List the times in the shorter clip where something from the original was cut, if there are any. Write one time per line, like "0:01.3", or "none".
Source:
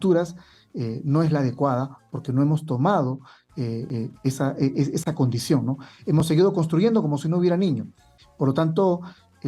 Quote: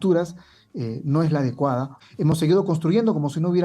0:02.0